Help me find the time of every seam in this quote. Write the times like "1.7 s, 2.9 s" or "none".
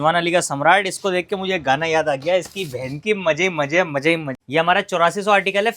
4.3 s